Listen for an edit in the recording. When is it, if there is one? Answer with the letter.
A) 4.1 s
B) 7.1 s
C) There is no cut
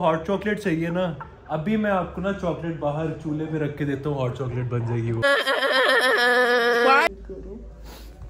B